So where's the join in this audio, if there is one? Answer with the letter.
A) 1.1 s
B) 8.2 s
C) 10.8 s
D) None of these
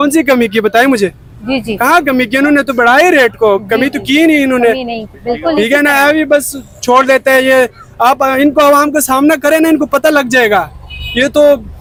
D